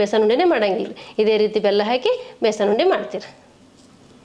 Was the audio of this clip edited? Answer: no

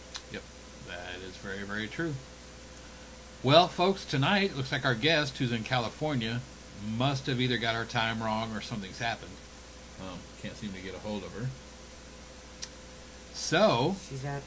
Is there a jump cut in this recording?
no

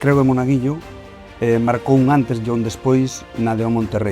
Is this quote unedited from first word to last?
yes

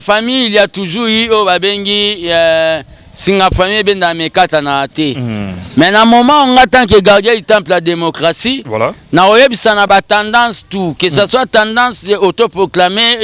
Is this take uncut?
yes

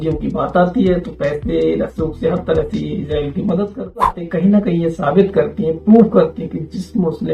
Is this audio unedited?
no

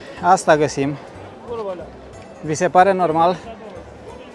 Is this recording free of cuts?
yes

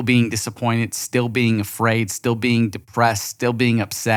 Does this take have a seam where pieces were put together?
no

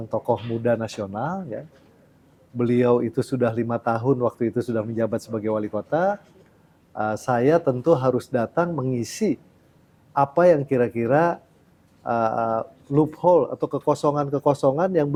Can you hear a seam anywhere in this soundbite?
no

